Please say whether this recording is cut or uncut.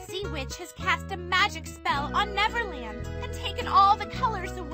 uncut